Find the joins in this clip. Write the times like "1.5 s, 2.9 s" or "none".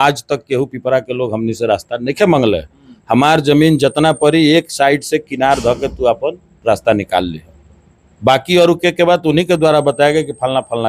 none